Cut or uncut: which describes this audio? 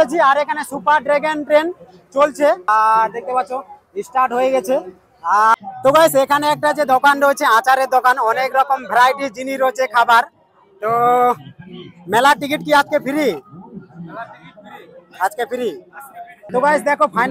cut